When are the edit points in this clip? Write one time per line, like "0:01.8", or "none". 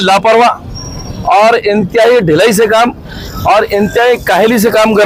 none